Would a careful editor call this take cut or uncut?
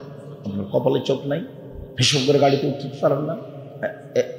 uncut